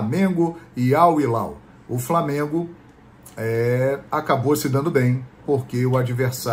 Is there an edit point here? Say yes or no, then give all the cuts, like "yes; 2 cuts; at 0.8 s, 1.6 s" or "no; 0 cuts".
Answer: no; 0 cuts